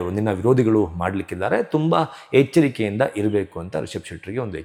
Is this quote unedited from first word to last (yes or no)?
yes